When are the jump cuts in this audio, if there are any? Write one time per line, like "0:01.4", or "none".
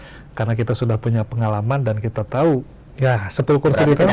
0:02.7

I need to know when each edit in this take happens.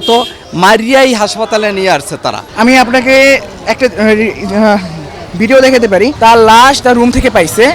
0:02.5
0:06.2

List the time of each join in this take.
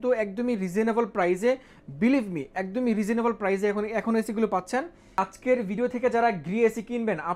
0:05.2

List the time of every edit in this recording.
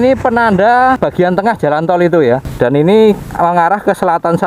0:01.0
0:02.5

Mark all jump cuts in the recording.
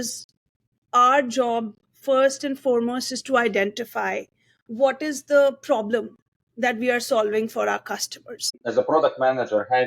0:08.5

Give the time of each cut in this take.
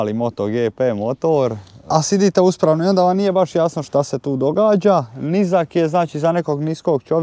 0:01.9

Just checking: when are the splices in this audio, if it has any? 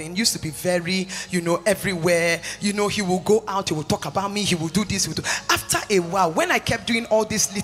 none

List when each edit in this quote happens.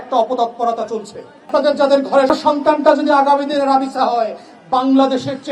0:01.5

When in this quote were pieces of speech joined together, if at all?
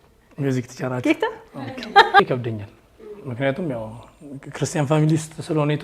0:02.2

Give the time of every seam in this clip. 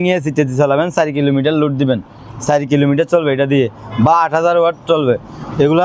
none

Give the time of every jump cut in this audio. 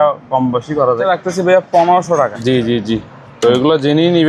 0:01.1
0:02.4

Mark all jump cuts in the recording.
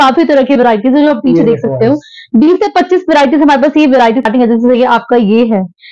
0:04.2

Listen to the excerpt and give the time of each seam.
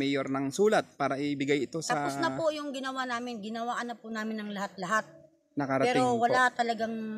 none

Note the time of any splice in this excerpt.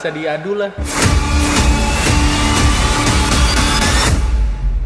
none

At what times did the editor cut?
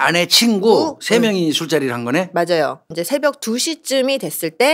0:02.9

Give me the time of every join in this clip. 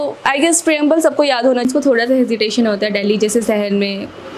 0:01.7

